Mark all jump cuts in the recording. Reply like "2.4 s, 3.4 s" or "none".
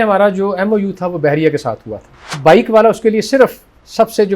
2.4 s